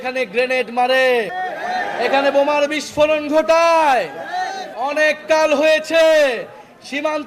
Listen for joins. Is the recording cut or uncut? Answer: cut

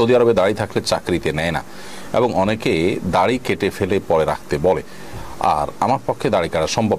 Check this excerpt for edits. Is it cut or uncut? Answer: uncut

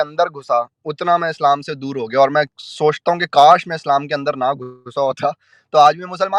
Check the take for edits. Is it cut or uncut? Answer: uncut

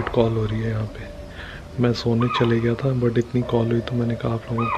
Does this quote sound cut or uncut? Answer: uncut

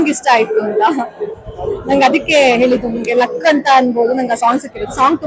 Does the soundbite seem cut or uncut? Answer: uncut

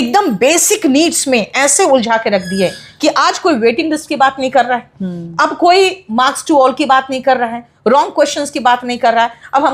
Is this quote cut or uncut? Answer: uncut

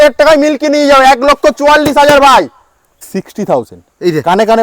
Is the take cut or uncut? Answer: cut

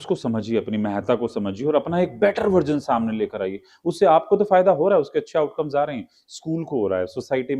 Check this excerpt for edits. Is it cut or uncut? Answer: uncut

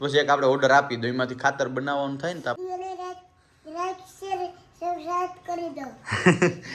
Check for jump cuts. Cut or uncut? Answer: uncut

